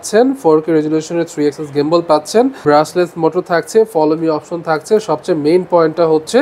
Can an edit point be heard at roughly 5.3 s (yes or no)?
no